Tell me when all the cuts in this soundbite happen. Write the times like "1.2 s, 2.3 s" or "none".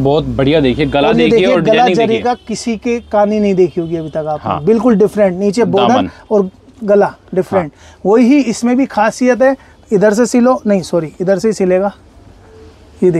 none